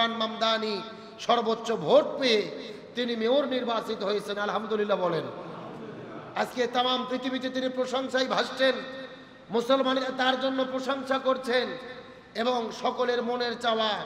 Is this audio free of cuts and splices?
yes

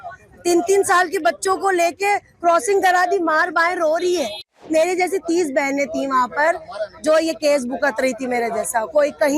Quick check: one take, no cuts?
no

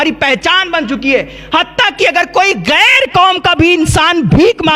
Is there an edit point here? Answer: no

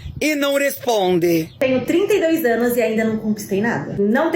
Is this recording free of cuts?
no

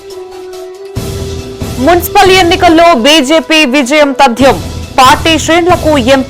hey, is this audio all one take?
no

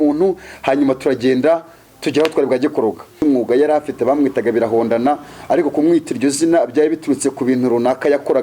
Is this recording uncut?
no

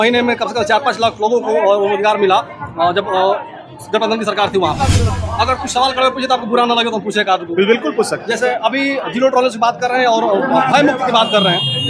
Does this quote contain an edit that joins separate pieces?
yes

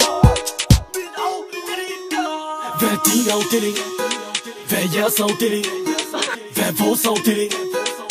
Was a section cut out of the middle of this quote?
yes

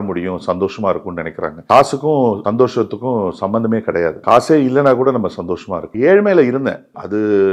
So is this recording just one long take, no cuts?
yes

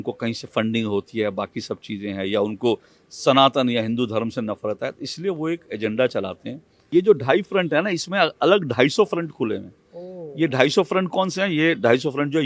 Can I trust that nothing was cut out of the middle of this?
no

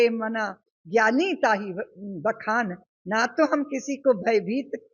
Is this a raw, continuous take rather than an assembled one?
yes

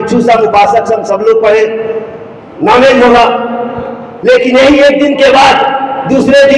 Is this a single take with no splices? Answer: yes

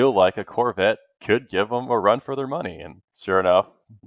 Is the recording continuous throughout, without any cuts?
yes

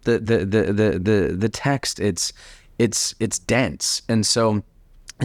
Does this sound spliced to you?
no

